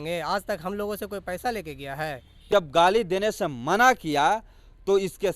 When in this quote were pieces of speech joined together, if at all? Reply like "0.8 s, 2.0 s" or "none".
2.4 s